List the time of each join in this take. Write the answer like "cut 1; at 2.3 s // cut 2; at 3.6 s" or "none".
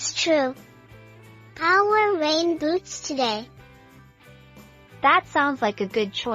cut 1; at 3.5 s // cut 2; at 5.0 s